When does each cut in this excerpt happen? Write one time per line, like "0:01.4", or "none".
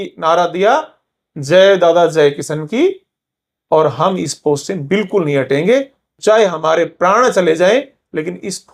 none